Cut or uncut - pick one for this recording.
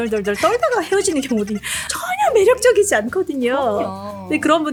uncut